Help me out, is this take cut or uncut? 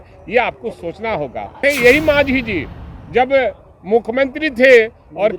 cut